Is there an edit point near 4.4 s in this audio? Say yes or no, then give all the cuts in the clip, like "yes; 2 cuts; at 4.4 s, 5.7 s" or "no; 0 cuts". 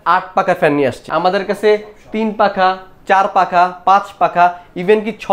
no; 1 cut; at 1.0 s